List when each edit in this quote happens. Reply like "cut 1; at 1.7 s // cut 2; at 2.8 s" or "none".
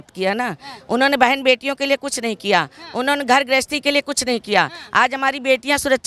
none